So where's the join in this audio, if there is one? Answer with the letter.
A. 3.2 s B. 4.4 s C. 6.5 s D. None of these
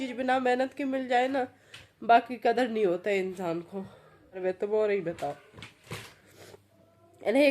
B